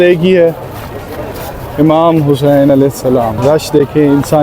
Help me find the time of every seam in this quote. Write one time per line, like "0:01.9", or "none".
0:03.4